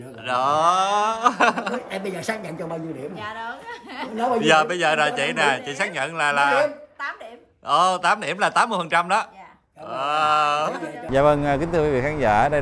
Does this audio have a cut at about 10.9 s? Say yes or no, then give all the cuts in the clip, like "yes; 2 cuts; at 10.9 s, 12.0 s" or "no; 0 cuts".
yes; 1 cut; at 10.9 s